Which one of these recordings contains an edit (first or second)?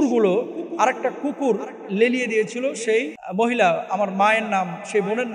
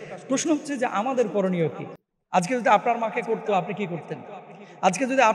first